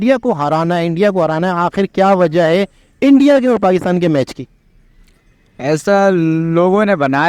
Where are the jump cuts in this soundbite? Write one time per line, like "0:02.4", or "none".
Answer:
none